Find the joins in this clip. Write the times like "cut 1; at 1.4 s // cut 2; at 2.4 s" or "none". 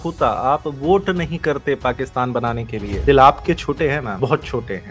cut 1; at 2.9 s